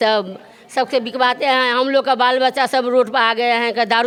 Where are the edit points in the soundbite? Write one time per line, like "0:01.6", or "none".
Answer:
none